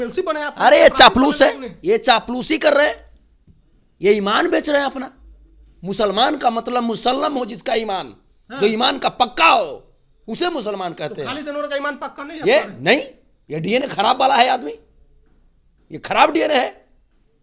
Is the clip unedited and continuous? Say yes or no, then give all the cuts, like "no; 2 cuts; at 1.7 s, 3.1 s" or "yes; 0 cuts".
yes; 0 cuts